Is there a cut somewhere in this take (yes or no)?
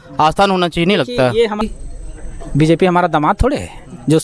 yes